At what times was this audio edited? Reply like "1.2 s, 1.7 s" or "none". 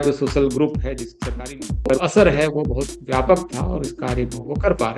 1.4 s